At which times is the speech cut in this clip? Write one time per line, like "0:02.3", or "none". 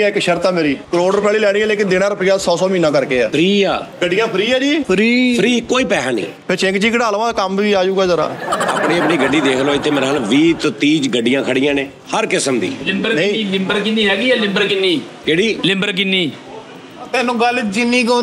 0:00.8
0:03.3
0:03.9
0:04.8
0:12.0